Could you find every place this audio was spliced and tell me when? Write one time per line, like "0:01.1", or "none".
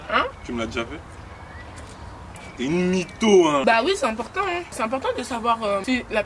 0:03.6